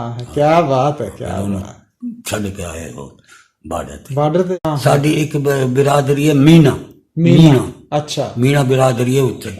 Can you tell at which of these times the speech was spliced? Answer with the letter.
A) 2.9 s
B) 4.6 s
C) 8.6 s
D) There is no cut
B